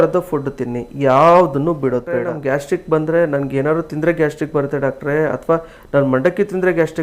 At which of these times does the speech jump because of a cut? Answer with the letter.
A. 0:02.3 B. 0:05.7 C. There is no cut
A